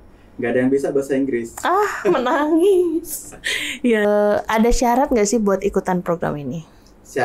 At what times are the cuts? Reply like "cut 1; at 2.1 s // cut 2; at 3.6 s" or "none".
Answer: cut 1; at 4.0 s